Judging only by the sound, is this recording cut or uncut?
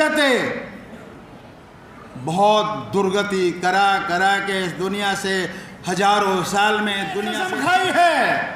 cut